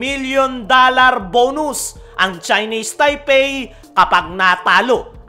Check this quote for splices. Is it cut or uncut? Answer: uncut